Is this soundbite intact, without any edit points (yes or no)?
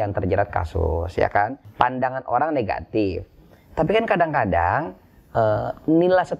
no